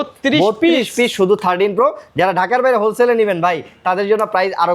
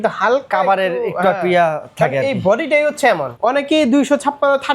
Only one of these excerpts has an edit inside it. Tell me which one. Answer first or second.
second